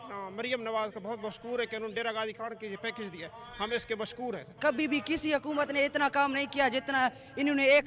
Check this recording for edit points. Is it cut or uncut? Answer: uncut